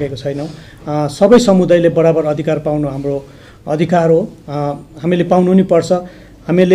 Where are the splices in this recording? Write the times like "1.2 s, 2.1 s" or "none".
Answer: none